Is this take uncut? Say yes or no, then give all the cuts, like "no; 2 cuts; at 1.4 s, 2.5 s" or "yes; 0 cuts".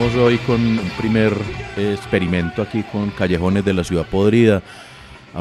no; 2 cuts; at 0.8 s, 1.6 s